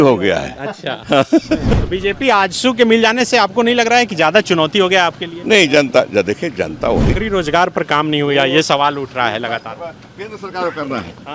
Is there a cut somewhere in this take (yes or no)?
yes